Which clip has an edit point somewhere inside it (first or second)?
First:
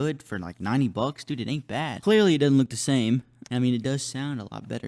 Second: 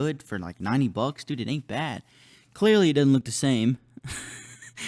first